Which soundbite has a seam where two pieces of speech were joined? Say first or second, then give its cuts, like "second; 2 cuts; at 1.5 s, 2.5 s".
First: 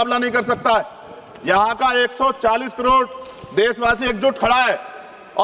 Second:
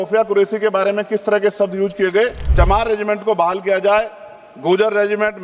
second; 1 cut; at 2.4 s